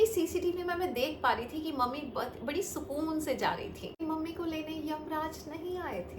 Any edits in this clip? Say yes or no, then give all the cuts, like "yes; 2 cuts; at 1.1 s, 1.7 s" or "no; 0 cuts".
yes; 1 cut; at 4.0 s